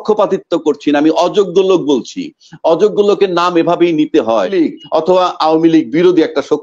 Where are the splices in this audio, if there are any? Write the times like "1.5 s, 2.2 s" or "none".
4.5 s